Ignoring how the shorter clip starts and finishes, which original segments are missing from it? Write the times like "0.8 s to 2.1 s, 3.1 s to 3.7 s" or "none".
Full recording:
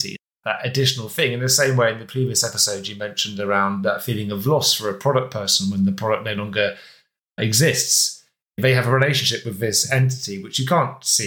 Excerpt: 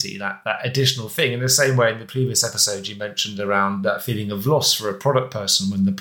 none